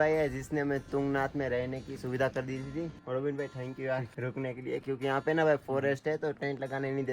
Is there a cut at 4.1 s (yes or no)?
yes